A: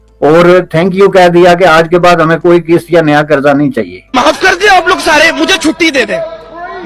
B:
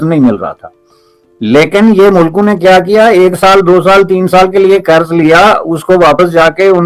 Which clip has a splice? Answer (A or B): A